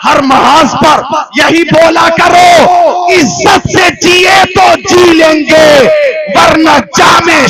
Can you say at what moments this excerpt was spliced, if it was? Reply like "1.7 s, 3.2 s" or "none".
none